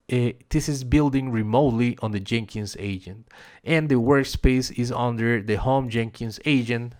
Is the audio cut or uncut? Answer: uncut